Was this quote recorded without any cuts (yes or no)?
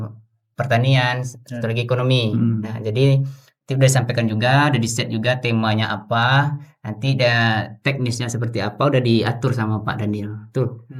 yes